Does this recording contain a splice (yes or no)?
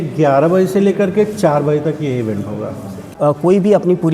yes